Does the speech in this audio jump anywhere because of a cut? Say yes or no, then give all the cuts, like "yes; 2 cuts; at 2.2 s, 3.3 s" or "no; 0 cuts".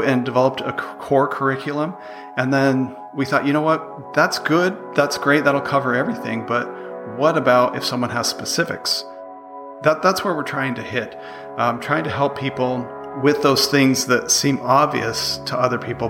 yes; 2 cuts; at 9.4 s, 13.0 s